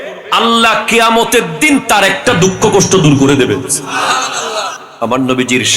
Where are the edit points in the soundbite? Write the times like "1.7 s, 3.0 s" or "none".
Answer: 4.8 s